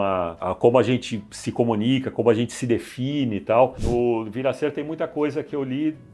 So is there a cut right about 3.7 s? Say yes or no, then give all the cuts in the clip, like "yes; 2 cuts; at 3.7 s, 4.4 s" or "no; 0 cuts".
yes; 1 cut; at 3.7 s